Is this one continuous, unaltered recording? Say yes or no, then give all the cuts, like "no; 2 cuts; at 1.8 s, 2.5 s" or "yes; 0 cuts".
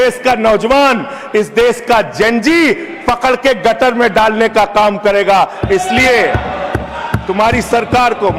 yes; 0 cuts